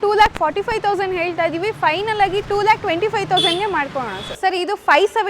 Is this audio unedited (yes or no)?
no